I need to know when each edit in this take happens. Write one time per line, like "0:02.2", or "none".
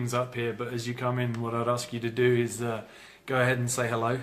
none